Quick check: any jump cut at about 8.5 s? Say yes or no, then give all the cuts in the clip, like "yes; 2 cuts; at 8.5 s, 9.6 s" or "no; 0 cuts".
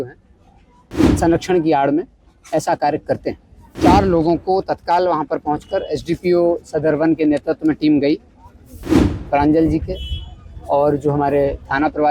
no; 1 cut; at 3.7 s